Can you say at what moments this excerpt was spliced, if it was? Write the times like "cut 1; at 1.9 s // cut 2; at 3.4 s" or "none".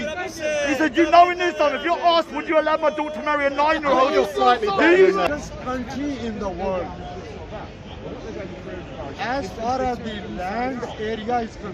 cut 1; at 5.2 s